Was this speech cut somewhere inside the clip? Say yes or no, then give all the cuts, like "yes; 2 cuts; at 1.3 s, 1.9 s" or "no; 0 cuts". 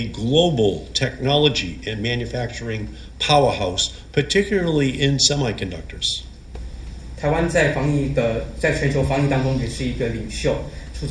no; 0 cuts